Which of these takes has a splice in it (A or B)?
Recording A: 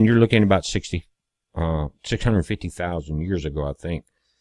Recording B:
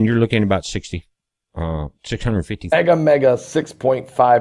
A